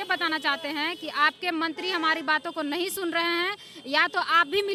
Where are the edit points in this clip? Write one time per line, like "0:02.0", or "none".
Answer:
none